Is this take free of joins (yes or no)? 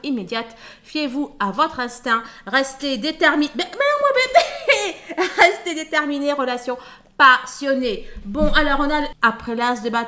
no